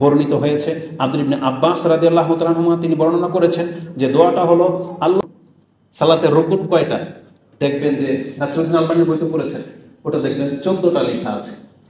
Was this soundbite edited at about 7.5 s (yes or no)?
no